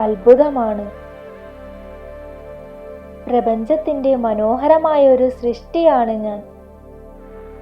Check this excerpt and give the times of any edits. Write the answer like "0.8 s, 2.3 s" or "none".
6.4 s